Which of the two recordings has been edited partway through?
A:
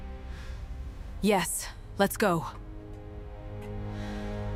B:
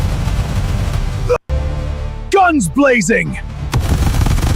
B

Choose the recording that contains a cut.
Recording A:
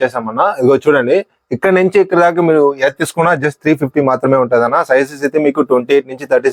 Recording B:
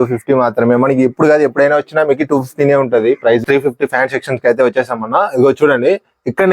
B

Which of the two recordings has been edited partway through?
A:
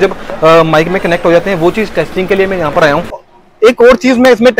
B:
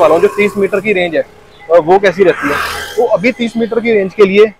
A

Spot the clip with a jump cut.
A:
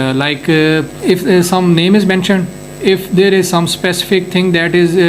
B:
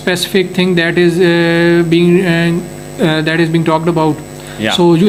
A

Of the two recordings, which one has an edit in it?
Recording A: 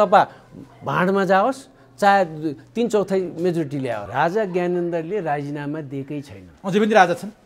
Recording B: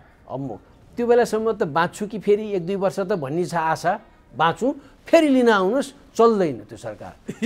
A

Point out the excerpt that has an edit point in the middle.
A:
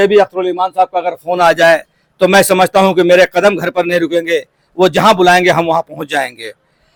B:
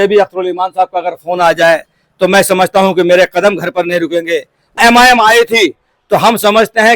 B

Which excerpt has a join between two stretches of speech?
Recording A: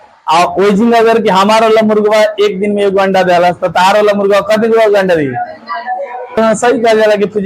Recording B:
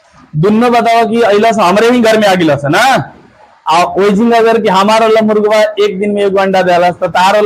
A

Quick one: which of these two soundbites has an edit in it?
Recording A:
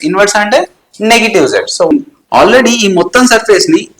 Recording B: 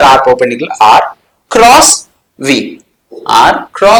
A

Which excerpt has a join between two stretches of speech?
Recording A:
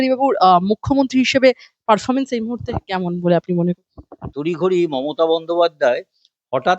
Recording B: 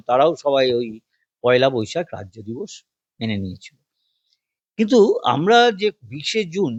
A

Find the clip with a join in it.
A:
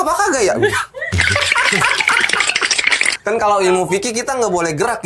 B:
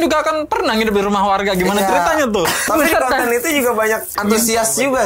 B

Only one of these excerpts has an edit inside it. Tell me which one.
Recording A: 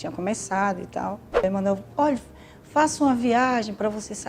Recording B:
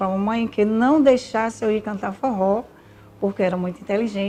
A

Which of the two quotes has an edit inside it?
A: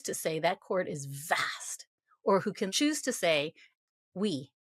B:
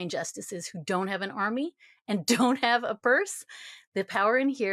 A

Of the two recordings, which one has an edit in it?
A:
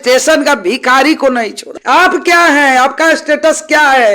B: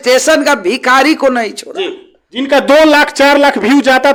A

